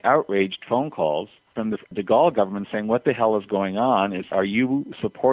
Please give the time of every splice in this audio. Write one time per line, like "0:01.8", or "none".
0:01.5
0:04.3